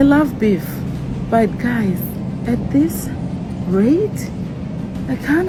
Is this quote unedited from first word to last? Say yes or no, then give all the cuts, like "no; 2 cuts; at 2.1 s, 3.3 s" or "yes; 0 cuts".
yes; 0 cuts